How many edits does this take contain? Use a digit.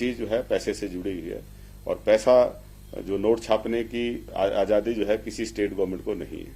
1